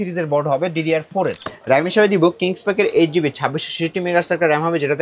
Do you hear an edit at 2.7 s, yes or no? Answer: no